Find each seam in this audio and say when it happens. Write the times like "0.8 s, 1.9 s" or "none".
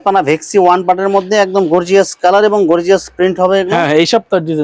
none

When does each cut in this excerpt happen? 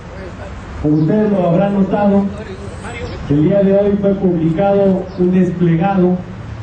none

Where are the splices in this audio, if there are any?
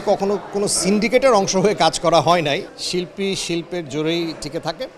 2.8 s

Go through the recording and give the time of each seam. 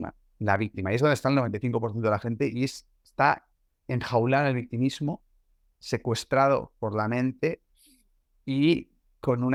none

